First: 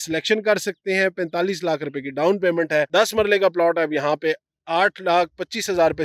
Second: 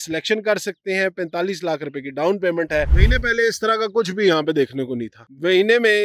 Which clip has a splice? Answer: second; 1 cut; at 2.9 s

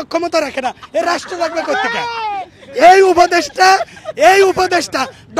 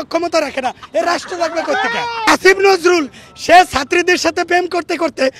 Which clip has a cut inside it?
second; 1 cut; at 2.2 s

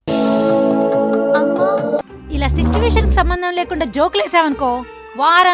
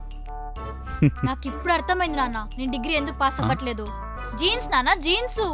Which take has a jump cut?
first; 1 cut; at 2.0 s

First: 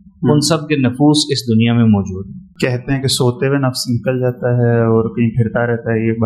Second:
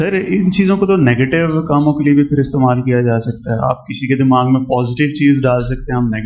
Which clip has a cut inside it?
first; 1 cut; at 2.5 s

